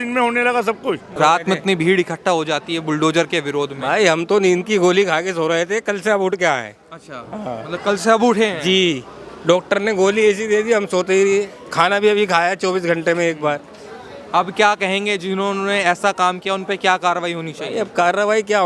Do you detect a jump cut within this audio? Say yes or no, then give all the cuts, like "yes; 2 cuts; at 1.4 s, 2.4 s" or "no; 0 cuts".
yes; 1 cut; at 1.1 s